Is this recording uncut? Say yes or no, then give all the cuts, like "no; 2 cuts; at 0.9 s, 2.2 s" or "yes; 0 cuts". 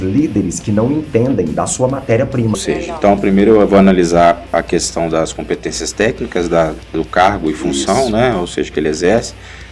no; 1 cut; at 2.6 s